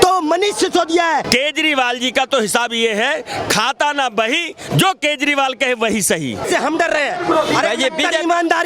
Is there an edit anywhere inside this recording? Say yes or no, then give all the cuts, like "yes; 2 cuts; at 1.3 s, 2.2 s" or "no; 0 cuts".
yes; 2 cuts; at 1.3 s, 6.4 s